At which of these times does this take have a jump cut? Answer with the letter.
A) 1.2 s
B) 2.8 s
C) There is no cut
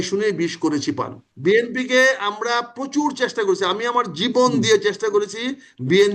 A